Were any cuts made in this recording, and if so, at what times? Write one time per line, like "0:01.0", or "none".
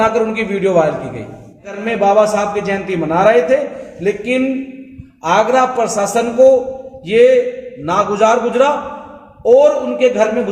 0:01.8